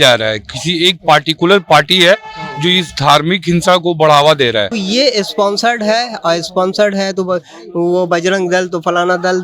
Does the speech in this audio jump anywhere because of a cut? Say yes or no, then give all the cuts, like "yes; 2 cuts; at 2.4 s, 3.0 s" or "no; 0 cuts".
yes; 1 cut; at 4.7 s